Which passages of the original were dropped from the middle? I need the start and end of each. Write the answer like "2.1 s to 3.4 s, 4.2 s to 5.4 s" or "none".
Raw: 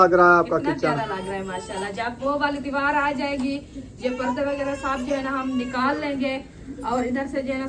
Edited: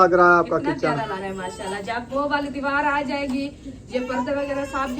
1.2 s to 1.3 s